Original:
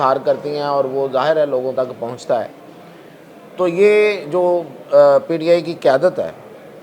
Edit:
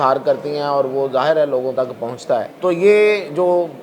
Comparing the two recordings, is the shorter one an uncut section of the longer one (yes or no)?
no